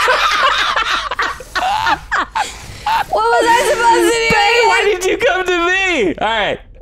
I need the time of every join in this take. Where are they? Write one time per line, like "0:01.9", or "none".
none